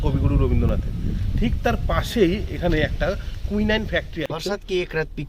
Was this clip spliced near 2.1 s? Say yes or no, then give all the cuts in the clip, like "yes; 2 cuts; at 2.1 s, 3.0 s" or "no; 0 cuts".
no; 1 cut; at 4.4 s